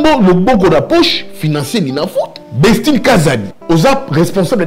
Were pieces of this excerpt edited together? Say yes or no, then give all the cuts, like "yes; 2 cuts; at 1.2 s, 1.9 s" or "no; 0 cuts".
yes; 2 cuts; at 2.4 s, 3.5 s